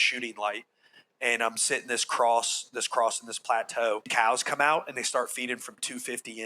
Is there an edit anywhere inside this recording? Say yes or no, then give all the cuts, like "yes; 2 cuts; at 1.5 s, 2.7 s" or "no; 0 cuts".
yes; 1 cut; at 4.1 s